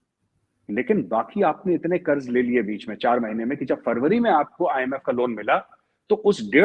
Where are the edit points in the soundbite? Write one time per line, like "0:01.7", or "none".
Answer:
none